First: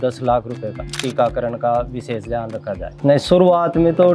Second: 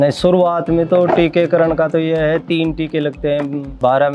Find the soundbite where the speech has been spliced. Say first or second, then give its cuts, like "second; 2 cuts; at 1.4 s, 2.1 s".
first; 1 cut; at 1.0 s